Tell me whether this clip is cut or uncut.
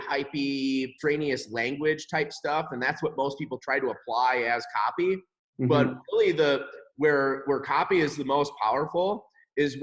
cut